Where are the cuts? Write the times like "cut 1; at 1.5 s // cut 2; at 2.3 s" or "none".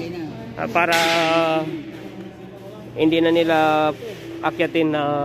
none